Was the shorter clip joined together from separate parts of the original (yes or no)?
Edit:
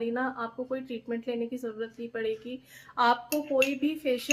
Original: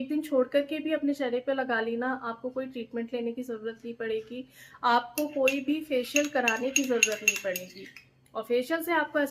no